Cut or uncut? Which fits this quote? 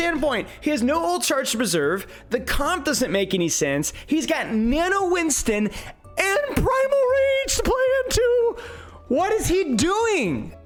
uncut